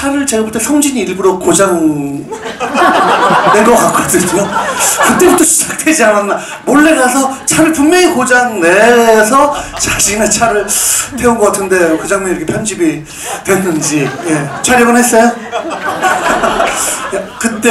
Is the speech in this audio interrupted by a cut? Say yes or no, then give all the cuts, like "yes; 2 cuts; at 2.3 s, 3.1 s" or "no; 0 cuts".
no; 0 cuts